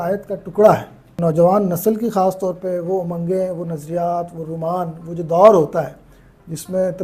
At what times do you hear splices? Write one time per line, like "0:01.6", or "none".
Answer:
0:01.2